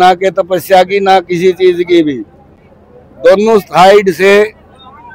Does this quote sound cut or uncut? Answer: uncut